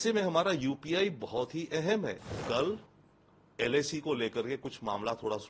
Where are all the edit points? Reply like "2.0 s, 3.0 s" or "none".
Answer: 2.3 s